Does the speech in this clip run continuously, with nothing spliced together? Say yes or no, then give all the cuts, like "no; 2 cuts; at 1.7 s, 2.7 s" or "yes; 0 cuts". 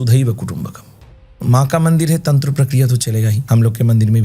no; 2 cuts; at 1.4 s, 3.4 s